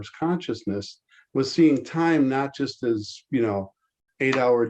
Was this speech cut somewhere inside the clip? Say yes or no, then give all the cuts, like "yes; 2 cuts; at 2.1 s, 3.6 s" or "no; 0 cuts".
no; 0 cuts